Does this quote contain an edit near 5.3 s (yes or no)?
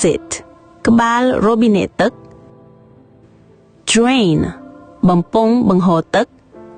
no